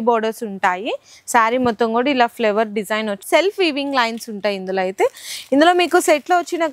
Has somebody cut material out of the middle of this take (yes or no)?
no